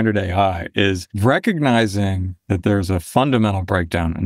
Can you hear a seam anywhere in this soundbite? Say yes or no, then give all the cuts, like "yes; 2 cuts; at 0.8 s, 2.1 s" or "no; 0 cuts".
yes; 1 cut; at 1.1 s